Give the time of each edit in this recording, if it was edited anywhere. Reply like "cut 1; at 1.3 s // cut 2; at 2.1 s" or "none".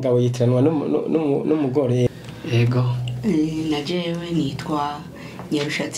cut 1; at 2.1 s